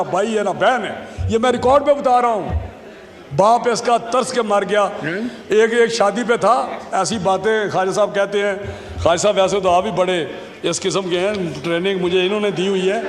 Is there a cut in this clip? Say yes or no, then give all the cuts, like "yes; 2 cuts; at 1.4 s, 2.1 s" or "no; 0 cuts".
no; 0 cuts